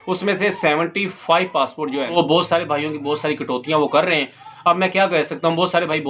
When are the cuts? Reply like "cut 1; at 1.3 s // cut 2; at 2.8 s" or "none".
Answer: cut 1; at 2.1 s